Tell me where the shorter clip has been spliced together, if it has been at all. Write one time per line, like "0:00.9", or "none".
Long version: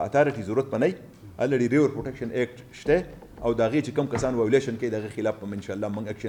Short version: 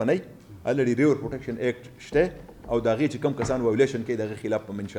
none